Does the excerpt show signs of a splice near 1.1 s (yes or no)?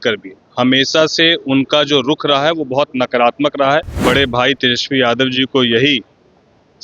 no